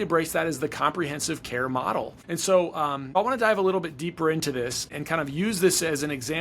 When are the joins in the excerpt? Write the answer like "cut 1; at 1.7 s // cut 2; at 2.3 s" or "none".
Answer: cut 1; at 2.2 s // cut 2; at 3.2 s // cut 3; at 4.9 s